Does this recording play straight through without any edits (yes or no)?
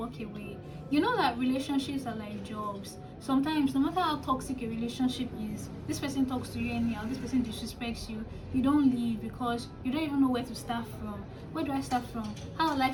yes